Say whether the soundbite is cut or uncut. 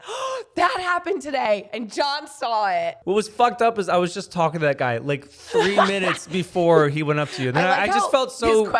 cut